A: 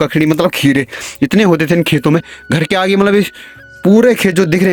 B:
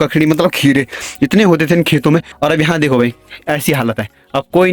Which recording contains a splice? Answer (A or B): B